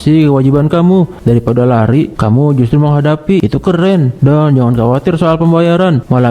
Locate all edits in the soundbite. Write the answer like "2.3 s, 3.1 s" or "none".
none